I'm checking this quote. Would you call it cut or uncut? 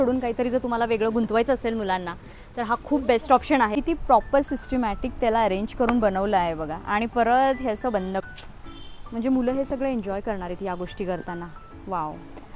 cut